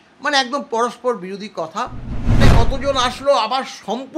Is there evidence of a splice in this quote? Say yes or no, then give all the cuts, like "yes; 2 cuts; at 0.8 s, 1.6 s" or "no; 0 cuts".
yes; 1 cut; at 2.4 s